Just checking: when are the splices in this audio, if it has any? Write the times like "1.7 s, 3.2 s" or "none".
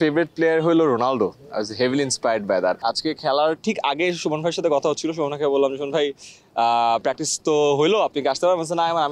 2.8 s